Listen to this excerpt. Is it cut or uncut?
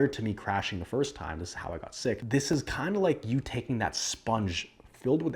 cut